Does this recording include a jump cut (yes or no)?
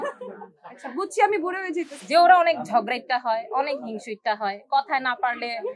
yes